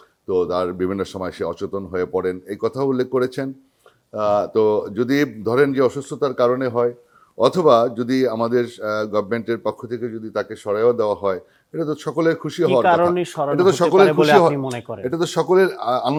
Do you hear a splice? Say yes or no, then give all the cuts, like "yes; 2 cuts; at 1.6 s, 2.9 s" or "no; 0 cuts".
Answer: no; 0 cuts